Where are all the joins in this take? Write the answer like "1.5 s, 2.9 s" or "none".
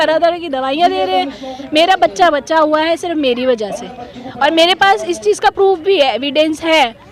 none